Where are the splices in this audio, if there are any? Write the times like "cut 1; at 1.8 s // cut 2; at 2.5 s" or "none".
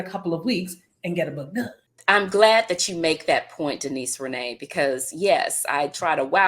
cut 1; at 1.9 s